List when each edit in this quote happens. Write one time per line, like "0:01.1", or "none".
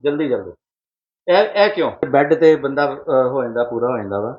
0:02.1